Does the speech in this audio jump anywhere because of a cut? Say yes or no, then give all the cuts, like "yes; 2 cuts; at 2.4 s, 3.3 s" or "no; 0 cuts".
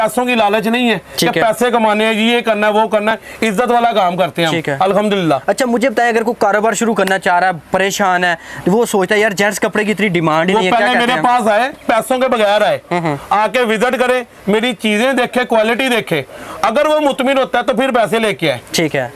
no; 0 cuts